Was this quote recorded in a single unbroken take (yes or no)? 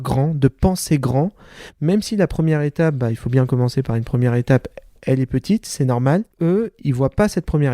yes